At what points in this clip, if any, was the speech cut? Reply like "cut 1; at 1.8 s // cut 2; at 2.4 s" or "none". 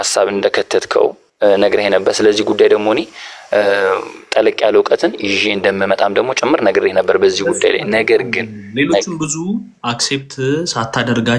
none